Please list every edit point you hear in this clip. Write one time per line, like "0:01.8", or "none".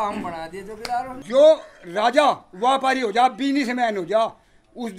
0:01.2

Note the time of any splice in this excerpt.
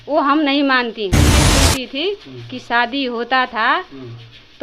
0:01.4

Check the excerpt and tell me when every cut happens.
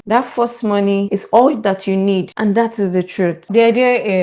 none

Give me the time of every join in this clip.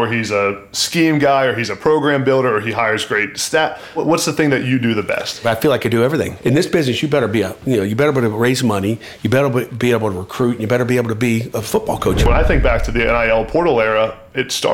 0:04.0
0:05.4
0:06.3
0:12.2

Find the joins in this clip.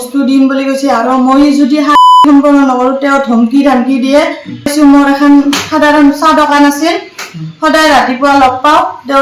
0:04.7

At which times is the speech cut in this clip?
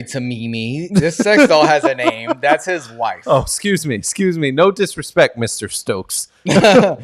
none

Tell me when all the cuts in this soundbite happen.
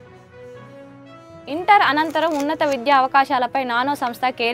none

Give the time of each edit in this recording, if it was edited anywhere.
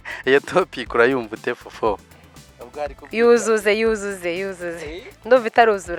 none

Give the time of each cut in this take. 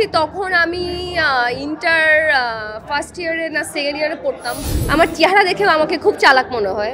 0:04.7

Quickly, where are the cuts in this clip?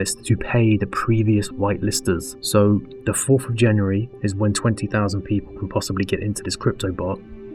none

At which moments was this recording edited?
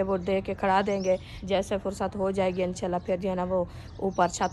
0:01.3

